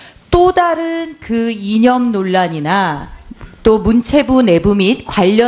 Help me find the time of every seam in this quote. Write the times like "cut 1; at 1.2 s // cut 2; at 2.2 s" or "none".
none